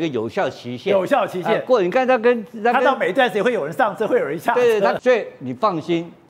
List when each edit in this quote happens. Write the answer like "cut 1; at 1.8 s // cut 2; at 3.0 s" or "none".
cut 1; at 5.0 s